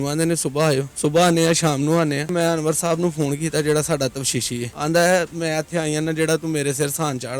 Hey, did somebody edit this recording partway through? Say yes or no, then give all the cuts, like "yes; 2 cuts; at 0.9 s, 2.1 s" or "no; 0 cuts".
yes; 3 cuts; at 0.9 s, 2.3 s, 4.8 s